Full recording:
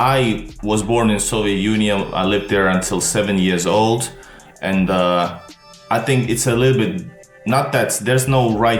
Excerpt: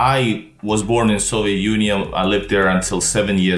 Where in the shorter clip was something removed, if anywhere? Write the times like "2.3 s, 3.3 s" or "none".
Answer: none